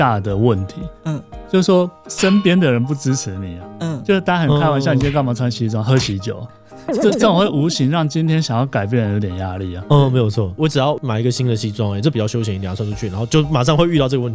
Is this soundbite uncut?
yes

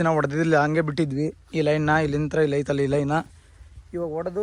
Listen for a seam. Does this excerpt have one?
no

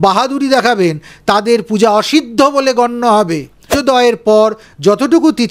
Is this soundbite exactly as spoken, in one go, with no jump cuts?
no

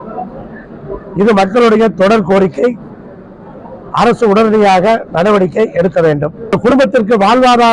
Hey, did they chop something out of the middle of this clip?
yes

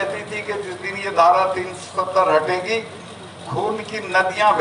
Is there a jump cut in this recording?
no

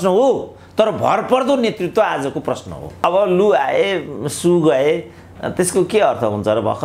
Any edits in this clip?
yes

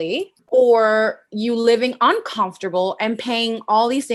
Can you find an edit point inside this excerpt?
no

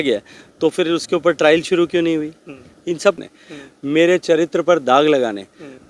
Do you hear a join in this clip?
yes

